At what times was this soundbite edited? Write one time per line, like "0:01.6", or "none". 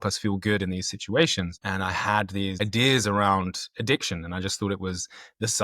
0:01.6
0:02.6